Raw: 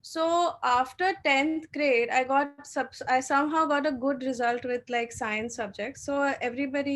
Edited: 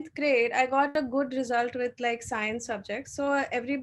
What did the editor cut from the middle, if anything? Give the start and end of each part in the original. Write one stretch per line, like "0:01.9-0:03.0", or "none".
0:02.5-0:03.8